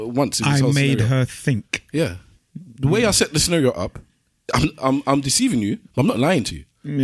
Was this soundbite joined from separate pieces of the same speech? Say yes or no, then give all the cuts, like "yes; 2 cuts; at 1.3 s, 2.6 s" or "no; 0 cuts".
yes; 1 cut; at 2.3 s